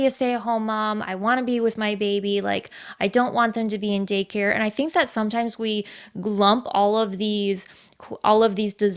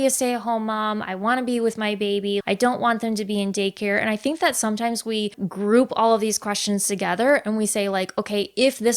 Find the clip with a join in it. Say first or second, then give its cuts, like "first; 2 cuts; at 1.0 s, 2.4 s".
second; 2 cuts; at 2.4 s, 5.4 s